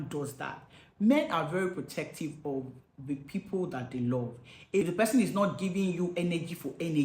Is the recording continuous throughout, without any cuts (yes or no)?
no